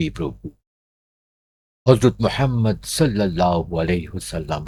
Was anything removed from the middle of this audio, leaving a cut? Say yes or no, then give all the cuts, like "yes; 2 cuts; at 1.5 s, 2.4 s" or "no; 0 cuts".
no; 0 cuts